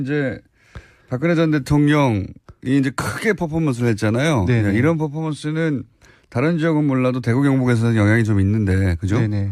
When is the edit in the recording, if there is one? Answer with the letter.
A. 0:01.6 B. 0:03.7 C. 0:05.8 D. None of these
B